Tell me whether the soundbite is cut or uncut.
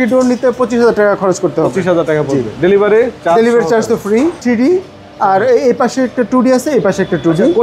cut